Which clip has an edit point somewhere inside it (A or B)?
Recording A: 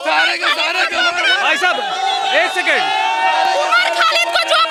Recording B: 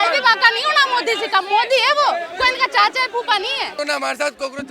B